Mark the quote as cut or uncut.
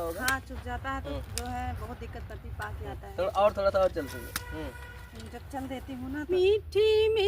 cut